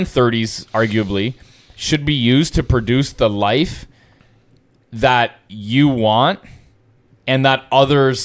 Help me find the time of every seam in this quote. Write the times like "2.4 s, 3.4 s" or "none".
none